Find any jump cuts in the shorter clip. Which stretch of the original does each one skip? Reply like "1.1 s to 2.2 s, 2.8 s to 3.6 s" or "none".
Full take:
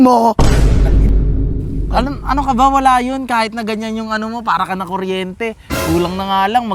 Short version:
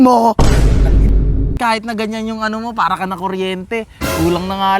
1.6 s to 3.3 s